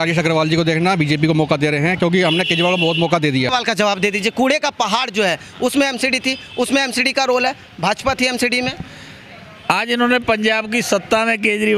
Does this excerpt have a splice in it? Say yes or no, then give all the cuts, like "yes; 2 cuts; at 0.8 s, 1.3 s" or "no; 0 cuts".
yes; 1 cut; at 3.5 s